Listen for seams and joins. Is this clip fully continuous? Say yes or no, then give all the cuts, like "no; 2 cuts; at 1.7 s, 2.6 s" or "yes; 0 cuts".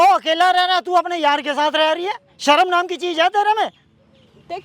yes; 0 cuts